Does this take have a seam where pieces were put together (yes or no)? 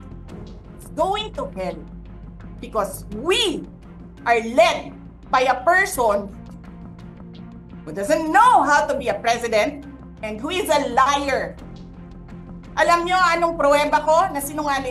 no